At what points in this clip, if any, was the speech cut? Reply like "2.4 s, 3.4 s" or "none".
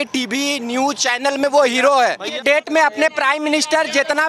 2.4 s